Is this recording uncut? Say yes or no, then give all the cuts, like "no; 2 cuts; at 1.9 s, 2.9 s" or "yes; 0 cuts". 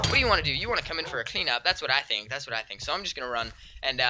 yes; 0 cuts